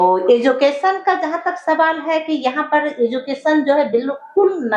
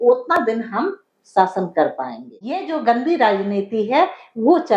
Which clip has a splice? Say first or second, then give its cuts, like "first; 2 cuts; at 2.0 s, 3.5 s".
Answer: second; 1 cut; at 2.7 s